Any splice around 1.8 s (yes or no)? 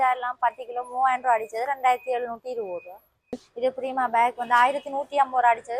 no